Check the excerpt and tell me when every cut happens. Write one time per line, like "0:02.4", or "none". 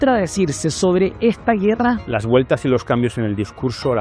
0:02.1